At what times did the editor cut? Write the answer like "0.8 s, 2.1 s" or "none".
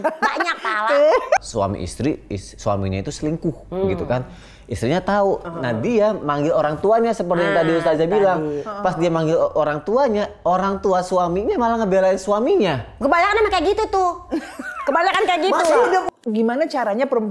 1.4 s, 5.4 s, 16.0 s

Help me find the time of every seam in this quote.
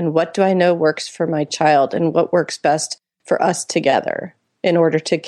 none

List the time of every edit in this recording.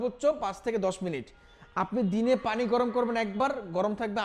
none

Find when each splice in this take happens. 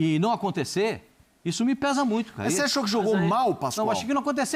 none

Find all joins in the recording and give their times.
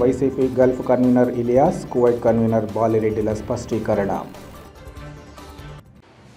none

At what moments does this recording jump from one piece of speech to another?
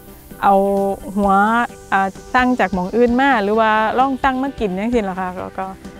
none

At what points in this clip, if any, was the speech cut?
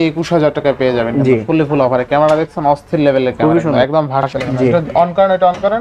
4.2 s

